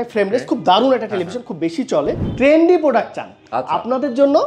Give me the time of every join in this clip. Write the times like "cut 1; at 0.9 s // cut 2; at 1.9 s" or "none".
cut 1; at 2.3 s